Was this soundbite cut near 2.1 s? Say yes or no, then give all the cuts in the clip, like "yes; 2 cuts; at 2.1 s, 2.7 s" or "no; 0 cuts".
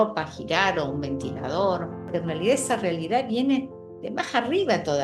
yes; 1 cut; at 2.1 s